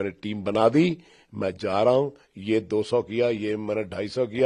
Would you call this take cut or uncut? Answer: uncut